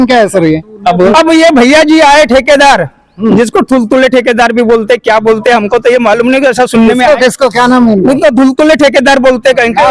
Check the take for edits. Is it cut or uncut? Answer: cut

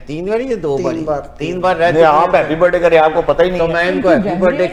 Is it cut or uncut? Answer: uncut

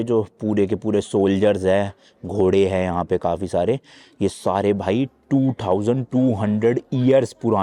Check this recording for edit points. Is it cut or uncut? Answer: uncut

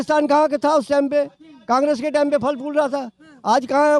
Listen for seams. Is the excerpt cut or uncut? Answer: uncut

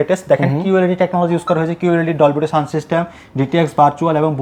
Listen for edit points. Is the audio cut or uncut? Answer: uncut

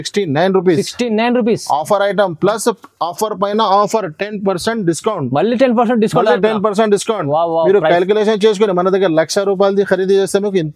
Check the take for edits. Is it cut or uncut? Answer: uncut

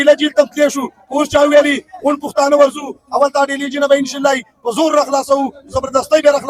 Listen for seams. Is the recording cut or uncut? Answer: uncut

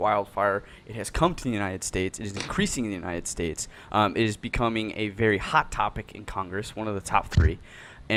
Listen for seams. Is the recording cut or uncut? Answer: uncut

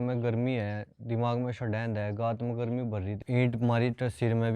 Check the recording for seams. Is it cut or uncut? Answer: cut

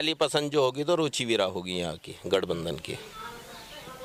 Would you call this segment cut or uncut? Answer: uncut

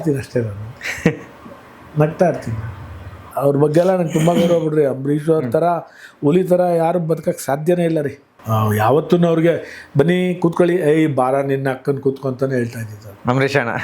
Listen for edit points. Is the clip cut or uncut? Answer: cut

